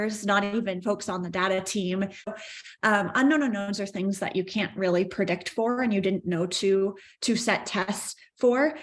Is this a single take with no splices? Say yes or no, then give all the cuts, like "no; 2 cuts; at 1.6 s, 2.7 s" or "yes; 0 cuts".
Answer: no; 1 cut; at 2.3 s